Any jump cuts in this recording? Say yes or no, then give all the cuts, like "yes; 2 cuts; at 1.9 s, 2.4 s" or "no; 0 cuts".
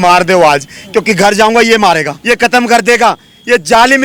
yes; 1 cut; at 2.1 s